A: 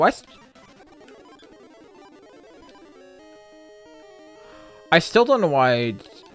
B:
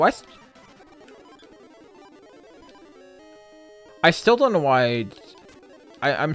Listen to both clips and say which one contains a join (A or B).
B